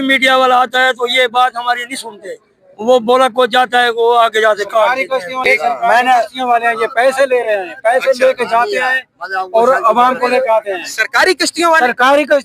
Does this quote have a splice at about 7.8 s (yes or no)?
no